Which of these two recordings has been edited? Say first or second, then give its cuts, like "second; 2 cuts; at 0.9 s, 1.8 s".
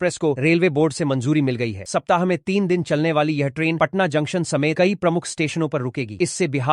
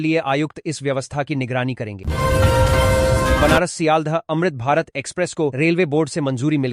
second; 2 cuts; at 2.0 s, 3.4 s